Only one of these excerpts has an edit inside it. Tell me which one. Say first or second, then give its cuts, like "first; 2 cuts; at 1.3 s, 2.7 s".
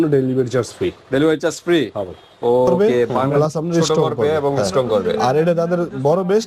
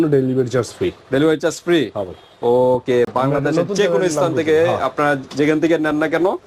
first; 1 cut; at 3.1 s